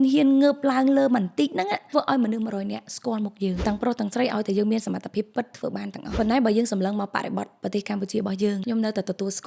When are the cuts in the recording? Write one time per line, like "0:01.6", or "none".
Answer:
0:01.8
0:03.6
0:06.2
0:08.6